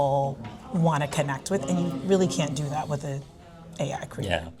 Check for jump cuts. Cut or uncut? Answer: uncut